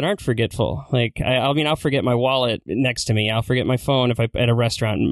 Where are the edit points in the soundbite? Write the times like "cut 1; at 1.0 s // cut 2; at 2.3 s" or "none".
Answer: cut 1; at 2.6 s